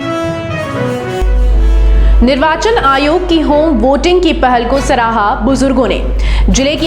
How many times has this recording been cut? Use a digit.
1